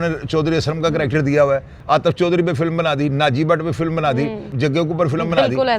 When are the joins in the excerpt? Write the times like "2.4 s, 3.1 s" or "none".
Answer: 1.7 s, 4.5 s